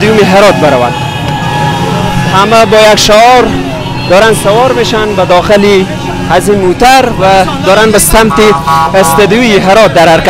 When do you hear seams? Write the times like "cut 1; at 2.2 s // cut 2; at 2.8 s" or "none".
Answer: none